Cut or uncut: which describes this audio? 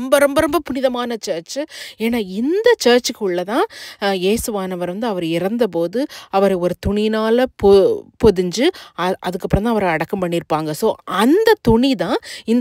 uncut